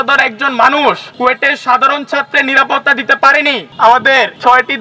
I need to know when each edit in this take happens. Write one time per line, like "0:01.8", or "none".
0:03.7